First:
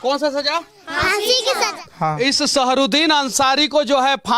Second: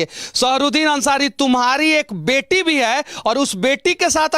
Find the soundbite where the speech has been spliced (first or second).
first